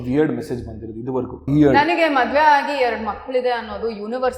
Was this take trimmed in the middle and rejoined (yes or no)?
yes